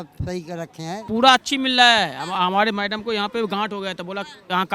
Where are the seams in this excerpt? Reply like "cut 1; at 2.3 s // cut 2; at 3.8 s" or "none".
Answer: cut 1; at 1.0 s